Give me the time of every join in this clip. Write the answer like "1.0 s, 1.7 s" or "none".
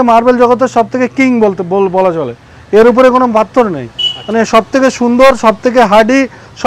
none